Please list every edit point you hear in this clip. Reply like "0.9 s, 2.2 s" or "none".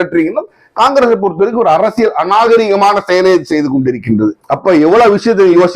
4.4 s